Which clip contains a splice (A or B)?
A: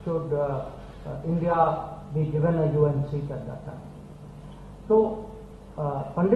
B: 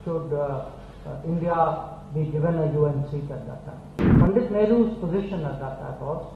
B